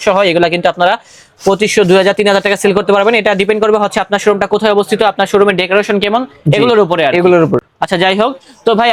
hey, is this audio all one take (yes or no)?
yes